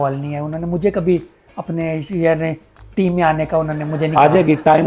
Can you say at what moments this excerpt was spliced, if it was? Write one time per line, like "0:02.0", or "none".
none